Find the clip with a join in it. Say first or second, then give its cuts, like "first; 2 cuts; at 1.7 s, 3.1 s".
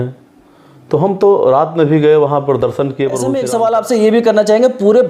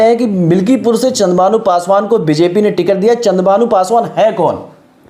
first; 1 cut; at 3.3 s